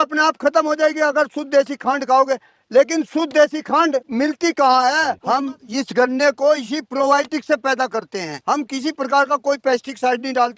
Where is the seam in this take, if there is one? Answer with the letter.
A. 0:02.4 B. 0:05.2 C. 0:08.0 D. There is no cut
B